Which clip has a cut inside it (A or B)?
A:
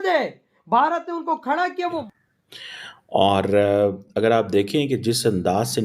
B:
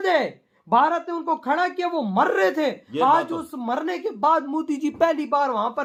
A